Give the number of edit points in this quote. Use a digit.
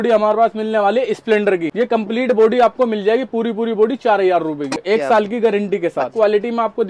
3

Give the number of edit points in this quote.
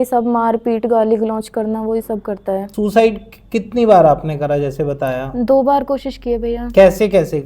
1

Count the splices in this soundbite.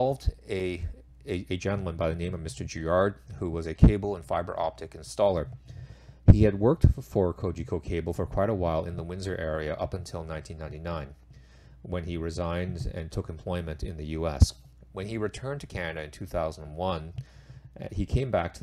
0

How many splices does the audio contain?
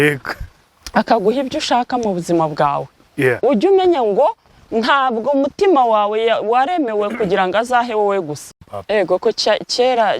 1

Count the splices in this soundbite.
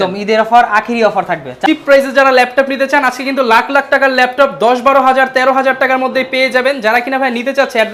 0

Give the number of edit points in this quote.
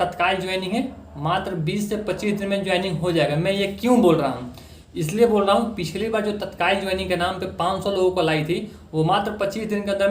0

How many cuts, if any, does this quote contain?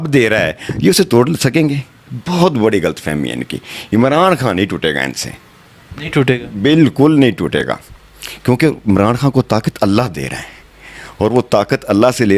0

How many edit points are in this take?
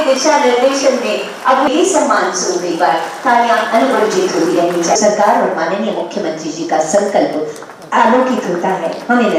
0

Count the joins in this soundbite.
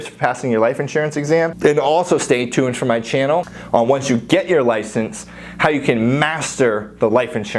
2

